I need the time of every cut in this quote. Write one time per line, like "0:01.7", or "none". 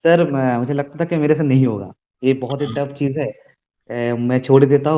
none